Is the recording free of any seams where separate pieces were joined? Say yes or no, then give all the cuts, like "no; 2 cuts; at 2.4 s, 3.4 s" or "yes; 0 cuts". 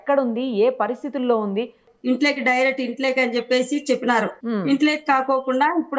no; 1 cut; at 1.8 s